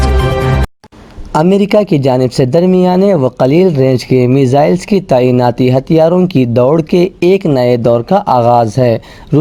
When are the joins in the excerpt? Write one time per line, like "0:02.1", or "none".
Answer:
none